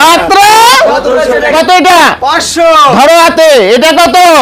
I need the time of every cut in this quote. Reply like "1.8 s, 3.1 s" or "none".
1.5 s